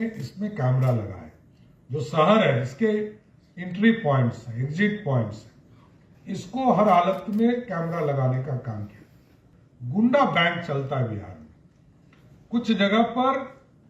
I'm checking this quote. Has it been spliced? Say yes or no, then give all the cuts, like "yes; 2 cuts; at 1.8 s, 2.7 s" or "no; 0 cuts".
yes; 1 cut; at 9.4 s